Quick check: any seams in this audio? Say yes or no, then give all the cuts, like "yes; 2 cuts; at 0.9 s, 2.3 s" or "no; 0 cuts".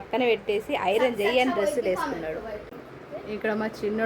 yes; 1 cut; at 2.7 s